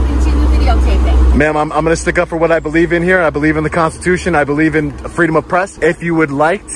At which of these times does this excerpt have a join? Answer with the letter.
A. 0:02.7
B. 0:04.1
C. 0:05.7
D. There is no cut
C